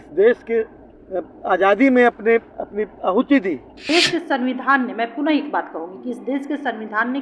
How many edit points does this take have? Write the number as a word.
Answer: one